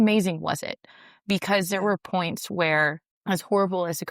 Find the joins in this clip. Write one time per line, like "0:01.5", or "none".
0:03.1